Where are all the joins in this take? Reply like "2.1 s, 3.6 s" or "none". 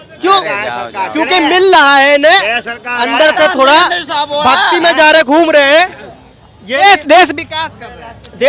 none